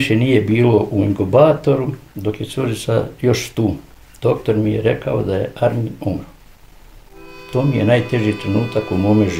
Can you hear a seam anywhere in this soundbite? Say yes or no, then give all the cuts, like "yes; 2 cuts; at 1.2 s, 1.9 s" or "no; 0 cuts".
no; 0 cuts